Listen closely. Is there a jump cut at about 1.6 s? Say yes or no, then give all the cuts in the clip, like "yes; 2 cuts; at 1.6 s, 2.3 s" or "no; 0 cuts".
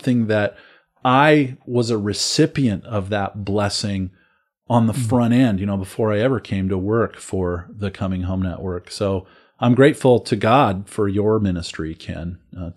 no; 0 cuts